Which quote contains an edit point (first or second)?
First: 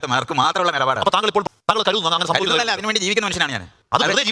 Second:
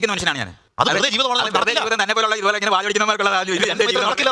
first